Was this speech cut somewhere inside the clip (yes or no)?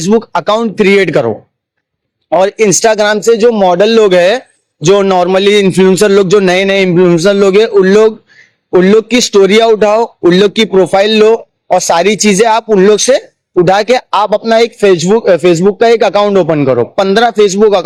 no